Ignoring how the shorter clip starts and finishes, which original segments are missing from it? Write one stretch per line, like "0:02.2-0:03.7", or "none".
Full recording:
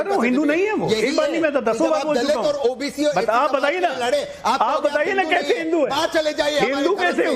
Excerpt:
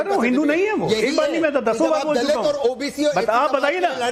none